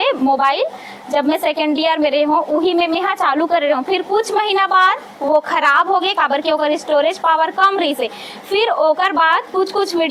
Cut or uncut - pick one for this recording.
uncut